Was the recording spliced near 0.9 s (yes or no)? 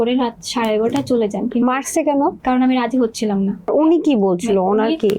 no